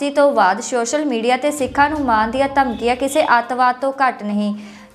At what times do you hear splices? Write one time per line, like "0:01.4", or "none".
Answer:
none